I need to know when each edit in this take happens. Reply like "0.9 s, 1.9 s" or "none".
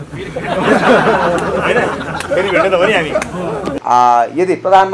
3.7 s